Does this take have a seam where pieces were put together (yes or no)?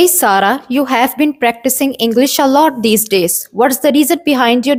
no